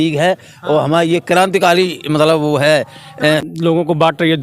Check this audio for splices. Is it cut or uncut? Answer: cut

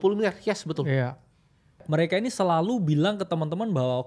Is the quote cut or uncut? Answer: cut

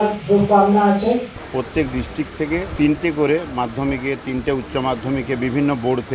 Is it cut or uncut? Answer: cut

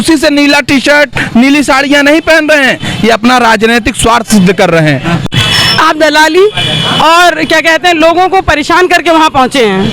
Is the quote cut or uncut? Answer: cut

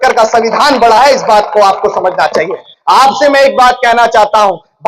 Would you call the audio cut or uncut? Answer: cut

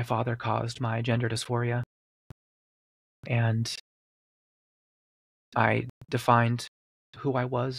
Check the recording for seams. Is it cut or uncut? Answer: uncut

